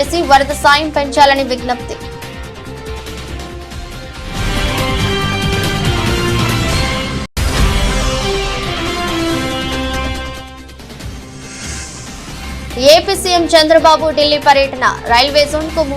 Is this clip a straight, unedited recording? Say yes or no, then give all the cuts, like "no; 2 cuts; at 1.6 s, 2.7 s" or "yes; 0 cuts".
no; 2 cuts; at 2.9 s, 7.3 s